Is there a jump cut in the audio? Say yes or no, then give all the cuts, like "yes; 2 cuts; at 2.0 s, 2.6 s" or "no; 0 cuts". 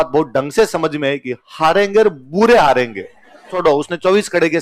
yes; 1 cut; at 3.5 s